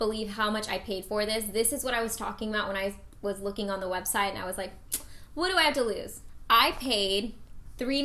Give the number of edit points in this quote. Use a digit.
0